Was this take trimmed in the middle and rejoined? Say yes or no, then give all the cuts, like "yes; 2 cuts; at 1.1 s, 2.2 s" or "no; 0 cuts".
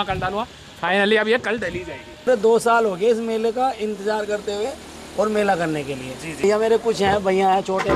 yes; 2 cuts; at 2.3 s, 6.4 s